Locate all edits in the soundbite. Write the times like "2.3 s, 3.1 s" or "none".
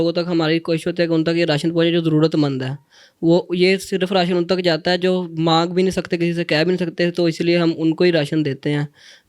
none